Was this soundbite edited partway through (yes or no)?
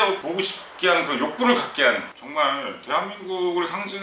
yes